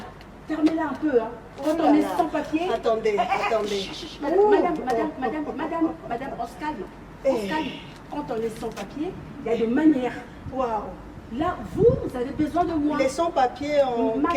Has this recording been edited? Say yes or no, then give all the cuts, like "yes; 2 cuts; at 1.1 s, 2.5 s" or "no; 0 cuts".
no; 0 cuts